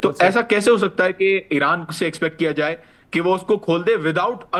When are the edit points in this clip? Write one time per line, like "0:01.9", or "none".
none